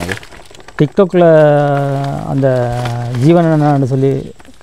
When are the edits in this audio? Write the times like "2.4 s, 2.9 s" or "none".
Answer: none